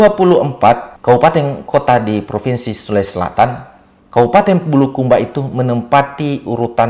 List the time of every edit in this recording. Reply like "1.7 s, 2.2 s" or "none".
0.9 s, 1.6 s